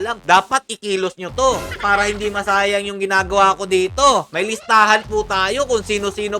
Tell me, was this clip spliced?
yes; 1 cut; at 1.7 s

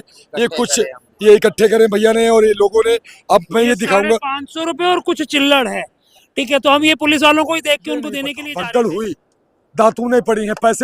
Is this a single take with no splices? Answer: no; 1 cut; at 8.3 s

